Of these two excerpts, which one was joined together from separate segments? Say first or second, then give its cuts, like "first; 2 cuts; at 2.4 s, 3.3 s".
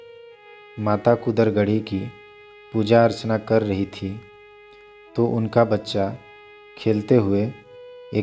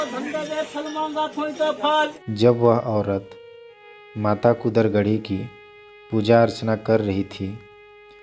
second; 1 cut; at 2.2 s